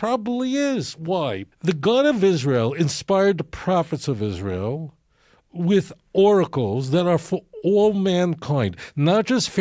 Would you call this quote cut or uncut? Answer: cut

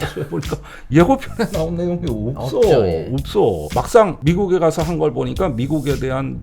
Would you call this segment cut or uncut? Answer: cut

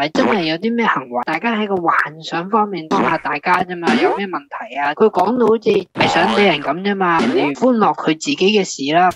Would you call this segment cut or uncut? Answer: cut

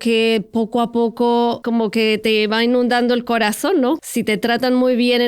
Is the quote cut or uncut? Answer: cut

